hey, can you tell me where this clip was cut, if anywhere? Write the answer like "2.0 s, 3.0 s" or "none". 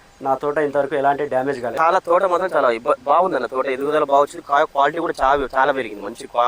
none